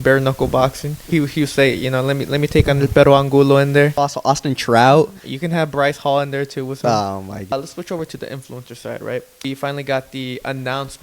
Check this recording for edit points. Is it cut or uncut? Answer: cut